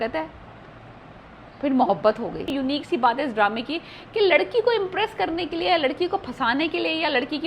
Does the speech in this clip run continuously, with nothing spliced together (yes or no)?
no